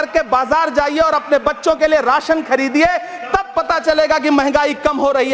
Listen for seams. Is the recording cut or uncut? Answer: uncut